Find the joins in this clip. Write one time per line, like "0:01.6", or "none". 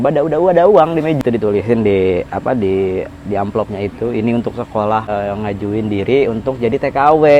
0:01.2
0:05.0